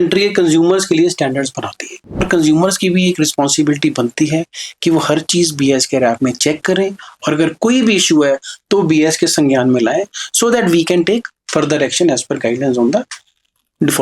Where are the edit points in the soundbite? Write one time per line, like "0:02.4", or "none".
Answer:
0:02.2